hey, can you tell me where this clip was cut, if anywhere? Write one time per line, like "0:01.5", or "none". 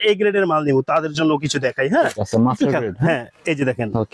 none